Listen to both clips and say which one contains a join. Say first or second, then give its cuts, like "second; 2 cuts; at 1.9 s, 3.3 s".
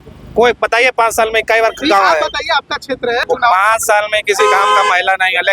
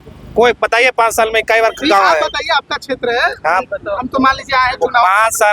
first; 1 cut; at 3.2 s